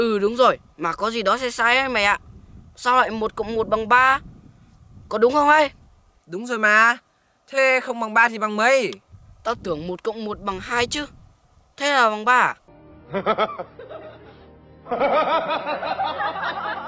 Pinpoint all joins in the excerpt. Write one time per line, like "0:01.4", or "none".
none